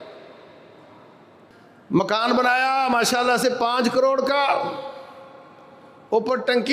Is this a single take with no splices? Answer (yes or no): no